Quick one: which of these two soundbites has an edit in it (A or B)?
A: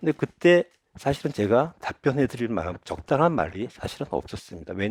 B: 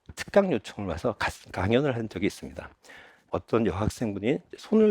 B